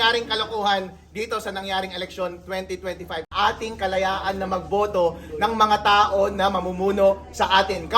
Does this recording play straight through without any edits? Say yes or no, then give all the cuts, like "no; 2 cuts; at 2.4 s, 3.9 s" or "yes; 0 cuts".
no; 1 cut; at 3.3 s